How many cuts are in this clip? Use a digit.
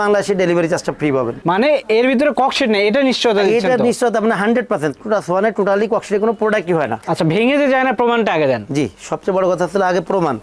2